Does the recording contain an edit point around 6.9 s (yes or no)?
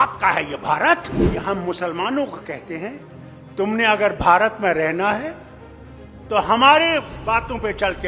no